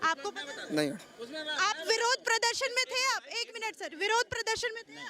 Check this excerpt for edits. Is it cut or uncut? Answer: uncut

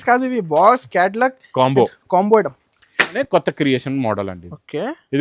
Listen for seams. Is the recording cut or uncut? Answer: cut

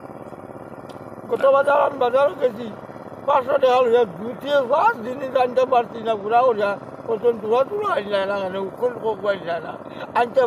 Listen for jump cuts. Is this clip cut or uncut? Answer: uncut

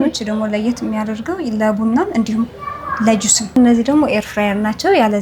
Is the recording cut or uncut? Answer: cut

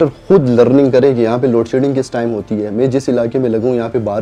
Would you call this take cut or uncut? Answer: uncut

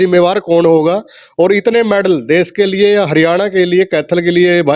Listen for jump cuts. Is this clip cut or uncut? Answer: uncut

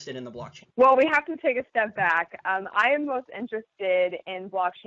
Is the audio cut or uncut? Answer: cut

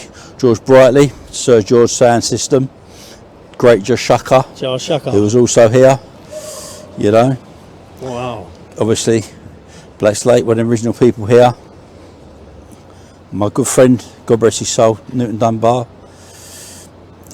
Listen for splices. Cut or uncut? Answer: uncut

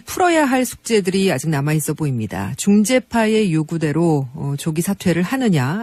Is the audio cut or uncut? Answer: uncut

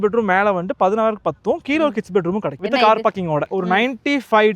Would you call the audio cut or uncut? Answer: cut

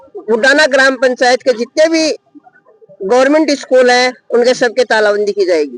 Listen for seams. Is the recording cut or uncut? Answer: uncut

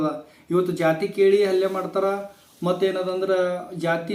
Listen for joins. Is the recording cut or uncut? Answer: uncut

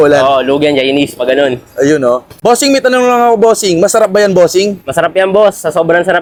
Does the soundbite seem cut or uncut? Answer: uncut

